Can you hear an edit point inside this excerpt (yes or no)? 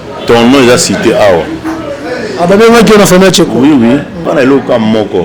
yes